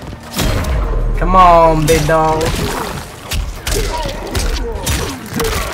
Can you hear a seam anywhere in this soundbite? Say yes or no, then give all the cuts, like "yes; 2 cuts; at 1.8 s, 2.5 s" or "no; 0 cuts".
no; 0 cuts